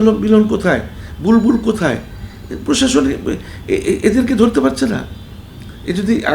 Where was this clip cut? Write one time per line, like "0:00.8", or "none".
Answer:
none